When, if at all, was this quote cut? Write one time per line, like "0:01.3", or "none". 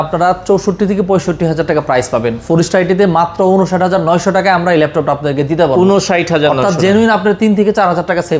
none